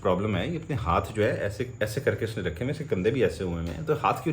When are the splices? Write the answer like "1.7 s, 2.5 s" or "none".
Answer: none